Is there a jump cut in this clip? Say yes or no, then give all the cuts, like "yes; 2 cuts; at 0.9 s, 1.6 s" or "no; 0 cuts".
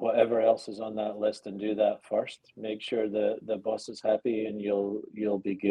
no; 0 cuts